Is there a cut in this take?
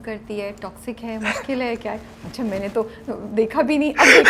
no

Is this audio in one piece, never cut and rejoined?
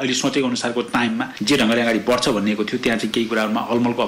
no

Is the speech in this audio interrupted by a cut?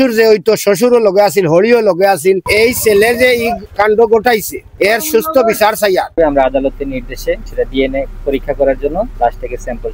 yes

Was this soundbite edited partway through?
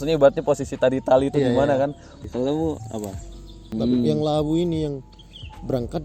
yes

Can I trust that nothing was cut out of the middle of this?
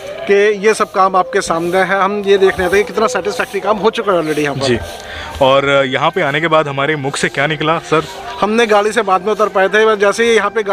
yes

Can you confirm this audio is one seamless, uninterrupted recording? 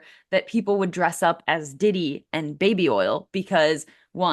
yes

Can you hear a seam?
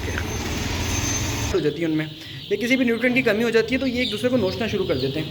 yes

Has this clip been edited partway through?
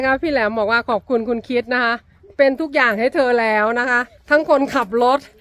no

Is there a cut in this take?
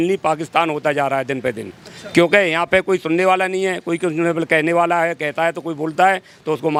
no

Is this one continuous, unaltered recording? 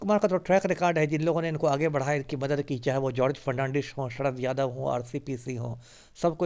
yes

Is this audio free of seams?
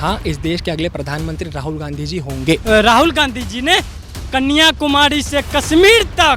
no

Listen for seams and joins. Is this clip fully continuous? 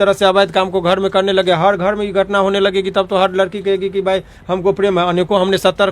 yes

